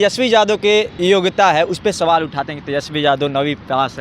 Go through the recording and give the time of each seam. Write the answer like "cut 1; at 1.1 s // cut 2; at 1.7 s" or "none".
cut 1; at 1.0 s

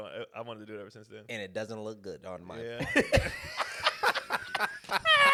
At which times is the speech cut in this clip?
none

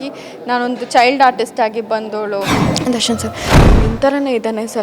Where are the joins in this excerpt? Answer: cut 1; at 2.6 s

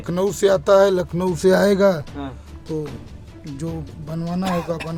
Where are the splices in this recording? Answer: none

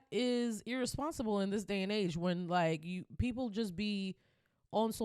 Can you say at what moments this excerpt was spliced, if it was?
none

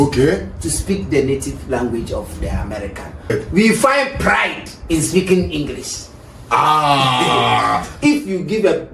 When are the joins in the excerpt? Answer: cut 1; at 3.3 s // cut 2; at 7.9 s

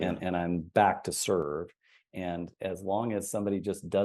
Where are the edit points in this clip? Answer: none

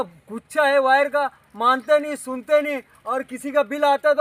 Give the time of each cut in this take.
none

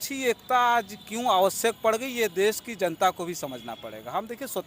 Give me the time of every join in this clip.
none

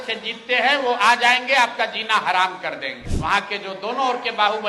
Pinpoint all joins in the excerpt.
cut 1; at 3.0 s

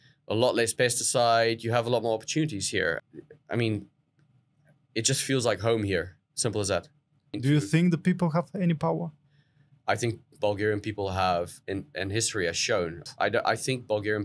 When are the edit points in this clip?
cut 1; at 3.0 s // cut 2; at 7.3 s // cut 3; at 13.0 s

